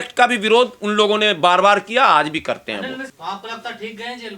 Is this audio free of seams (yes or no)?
no